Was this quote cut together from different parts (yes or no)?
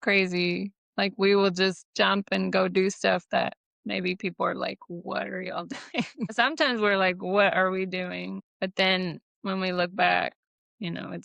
yes